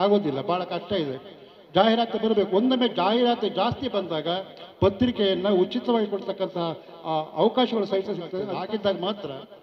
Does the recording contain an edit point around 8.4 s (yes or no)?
yes